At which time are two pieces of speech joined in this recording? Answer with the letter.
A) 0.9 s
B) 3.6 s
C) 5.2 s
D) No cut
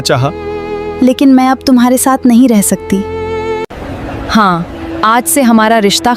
B